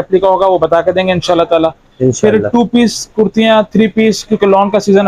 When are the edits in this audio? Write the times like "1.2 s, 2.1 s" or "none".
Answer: none